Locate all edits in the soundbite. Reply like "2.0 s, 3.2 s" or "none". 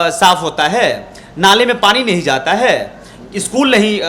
none